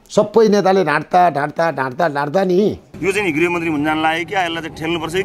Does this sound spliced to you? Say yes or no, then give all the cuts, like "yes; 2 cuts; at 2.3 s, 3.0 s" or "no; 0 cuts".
yes; 1 cut; at 2.9 s